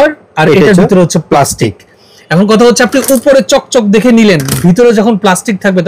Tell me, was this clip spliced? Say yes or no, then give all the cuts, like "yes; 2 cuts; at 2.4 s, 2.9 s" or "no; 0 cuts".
no; 0 cuts